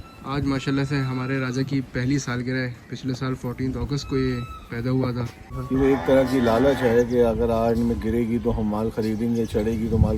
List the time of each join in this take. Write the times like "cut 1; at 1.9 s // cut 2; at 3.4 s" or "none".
cut 1; at 5.5 s